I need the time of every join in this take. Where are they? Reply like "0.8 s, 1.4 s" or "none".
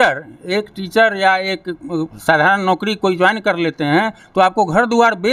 none